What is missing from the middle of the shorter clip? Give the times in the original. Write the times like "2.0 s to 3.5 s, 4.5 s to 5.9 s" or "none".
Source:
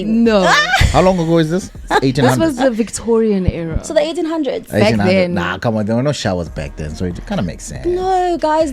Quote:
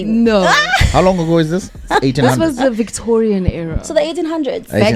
none

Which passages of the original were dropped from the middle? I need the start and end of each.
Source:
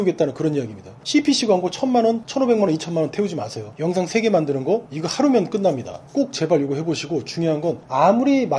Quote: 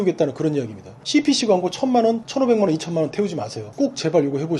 3.6 s to 6.0 s

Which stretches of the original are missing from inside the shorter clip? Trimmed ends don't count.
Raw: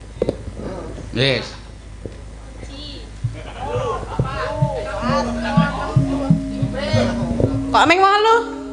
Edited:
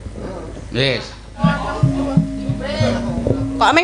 1.8 s to 5.5 s

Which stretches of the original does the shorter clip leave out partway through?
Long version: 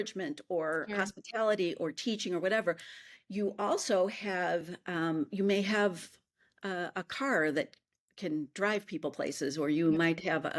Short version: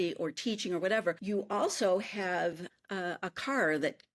2.8 s to 3.3 s, 4.8 s to 6.4 s

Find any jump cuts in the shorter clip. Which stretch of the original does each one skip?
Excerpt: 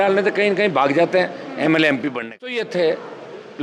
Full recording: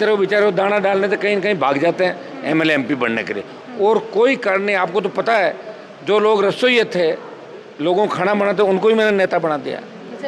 3.5 s to 6.8 s

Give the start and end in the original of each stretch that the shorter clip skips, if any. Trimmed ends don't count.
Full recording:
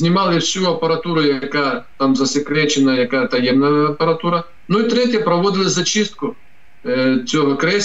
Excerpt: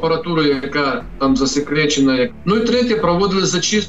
3.1 s to 4.5 s

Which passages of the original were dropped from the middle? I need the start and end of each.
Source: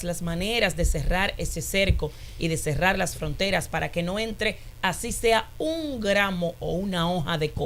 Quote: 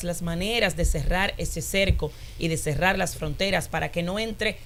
none

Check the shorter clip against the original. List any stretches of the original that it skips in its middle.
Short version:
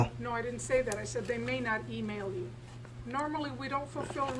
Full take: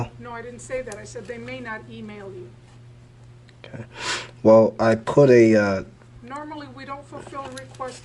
2.9 s to 6.1 s

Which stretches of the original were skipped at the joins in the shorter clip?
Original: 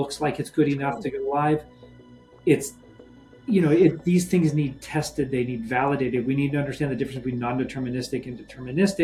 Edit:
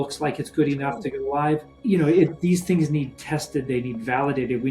1.7 s to 3.3 s

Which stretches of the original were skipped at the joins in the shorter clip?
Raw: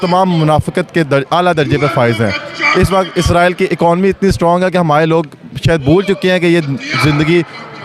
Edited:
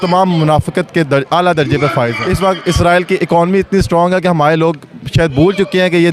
2.2 s to 2.7 s

